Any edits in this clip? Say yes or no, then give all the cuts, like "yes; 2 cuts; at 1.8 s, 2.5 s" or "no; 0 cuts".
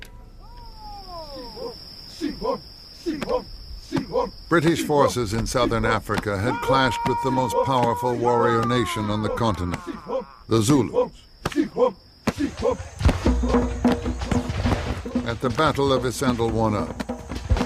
no; 0 cuts